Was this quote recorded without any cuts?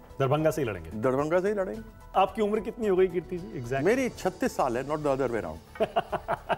no; 1 cut; at 2.1 s

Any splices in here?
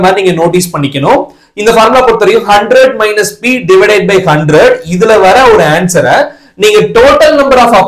no; 0 cuts

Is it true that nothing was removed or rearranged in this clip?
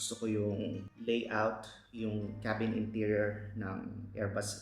no; 1 cut; at 0.9 s

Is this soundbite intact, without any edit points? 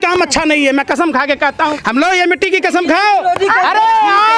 no; 1 cut; at 1.8 s

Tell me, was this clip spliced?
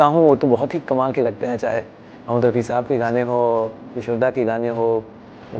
no; 0 cuts

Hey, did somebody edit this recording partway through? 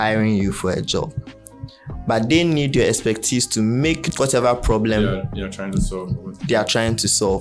yes; 1 cut; at 4.1 s

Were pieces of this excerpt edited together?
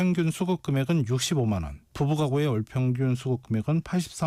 no; 0 cuts

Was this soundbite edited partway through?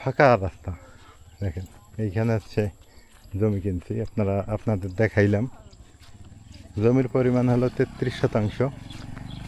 no; 0 cuts

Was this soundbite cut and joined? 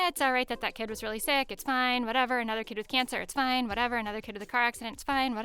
no; 0 cuts

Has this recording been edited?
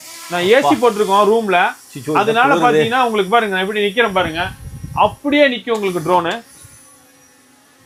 no; 0 cuts

